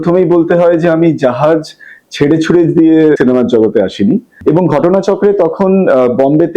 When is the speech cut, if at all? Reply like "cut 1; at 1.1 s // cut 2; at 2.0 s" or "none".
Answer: cut 1; at 4.4 s